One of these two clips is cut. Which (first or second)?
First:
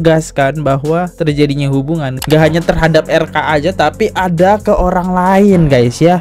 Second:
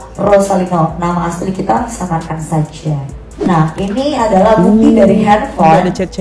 second